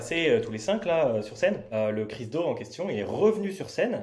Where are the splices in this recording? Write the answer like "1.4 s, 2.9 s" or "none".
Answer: 1.6 s